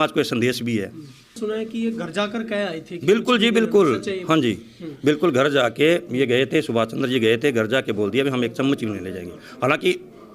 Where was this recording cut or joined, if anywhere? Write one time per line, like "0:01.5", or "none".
0:01.4